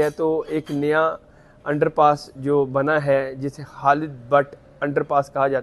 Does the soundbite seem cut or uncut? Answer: uncut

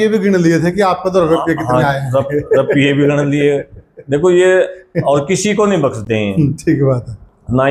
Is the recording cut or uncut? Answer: uncut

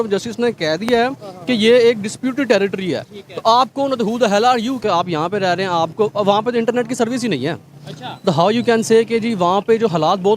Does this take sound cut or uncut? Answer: cut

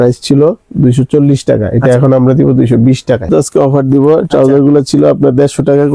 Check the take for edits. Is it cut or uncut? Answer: cut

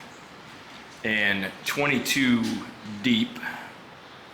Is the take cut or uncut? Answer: uncut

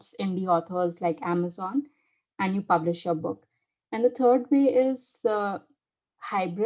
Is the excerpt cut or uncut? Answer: uncut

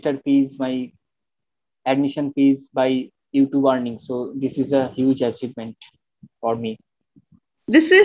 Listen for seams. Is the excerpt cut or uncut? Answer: uncut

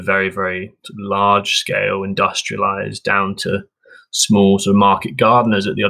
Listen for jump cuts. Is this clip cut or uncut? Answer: uncut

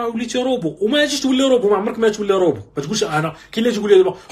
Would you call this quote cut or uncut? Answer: uncut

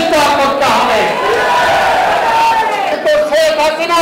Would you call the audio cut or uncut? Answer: cut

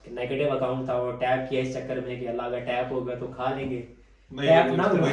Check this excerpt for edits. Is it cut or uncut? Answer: uncut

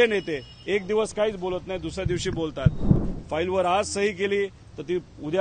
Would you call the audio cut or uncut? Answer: cut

